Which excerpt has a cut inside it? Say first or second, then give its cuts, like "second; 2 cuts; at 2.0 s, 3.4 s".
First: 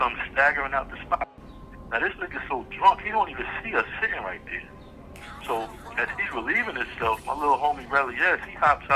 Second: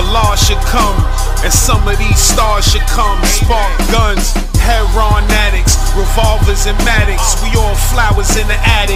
first; 1 cut; at 1.3 s